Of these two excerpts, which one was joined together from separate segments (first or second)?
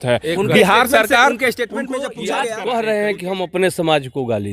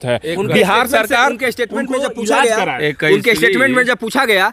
first